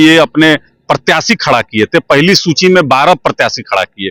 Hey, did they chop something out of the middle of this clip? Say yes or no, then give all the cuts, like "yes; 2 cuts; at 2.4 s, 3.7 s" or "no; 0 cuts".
no; 0 cuts